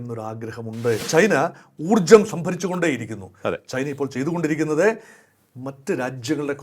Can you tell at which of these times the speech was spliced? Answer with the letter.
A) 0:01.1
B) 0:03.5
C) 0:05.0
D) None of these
A